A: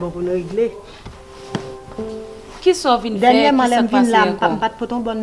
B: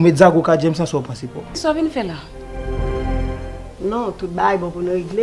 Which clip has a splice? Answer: B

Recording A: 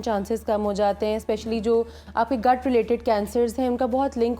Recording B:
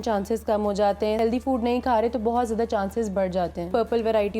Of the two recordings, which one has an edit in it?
B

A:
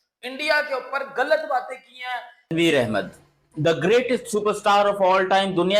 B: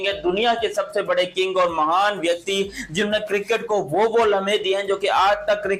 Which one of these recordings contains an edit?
A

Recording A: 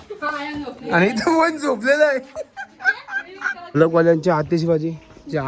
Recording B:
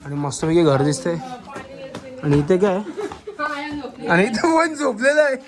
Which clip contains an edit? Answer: A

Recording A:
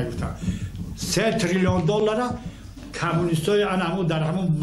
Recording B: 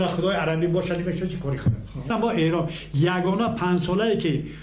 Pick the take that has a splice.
B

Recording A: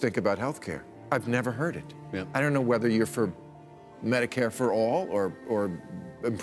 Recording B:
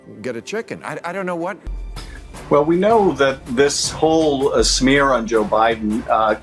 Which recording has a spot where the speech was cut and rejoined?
B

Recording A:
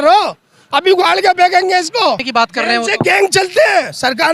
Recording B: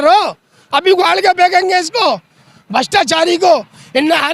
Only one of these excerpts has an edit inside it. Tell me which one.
A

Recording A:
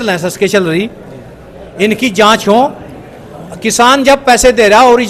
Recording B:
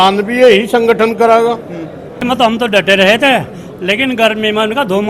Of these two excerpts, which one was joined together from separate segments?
B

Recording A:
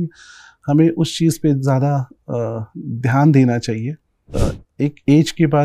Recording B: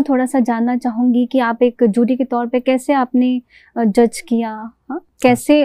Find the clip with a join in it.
A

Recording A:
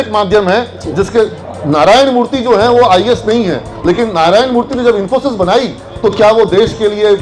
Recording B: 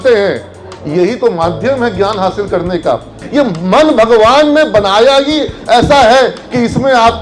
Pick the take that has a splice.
B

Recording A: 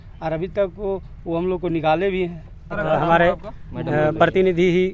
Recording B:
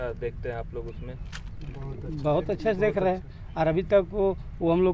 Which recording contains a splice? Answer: A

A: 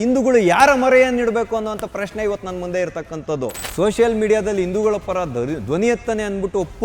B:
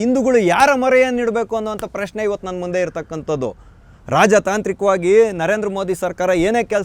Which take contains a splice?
A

